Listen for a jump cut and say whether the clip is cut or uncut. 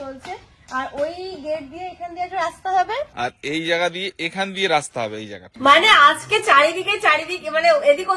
cut